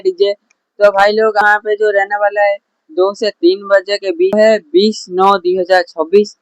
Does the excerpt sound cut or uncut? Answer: cut